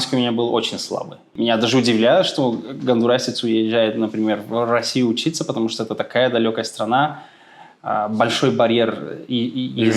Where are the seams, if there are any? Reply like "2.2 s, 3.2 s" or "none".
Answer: 1.3 s